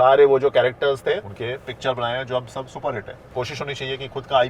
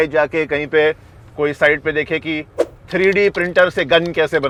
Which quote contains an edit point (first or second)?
first